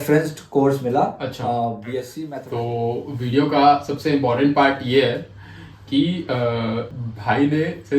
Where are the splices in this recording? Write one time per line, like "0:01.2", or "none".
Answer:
0:02.2
0:07.0